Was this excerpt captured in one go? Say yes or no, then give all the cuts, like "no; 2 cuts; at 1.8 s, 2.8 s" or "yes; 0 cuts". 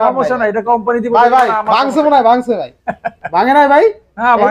yes; 0 cuts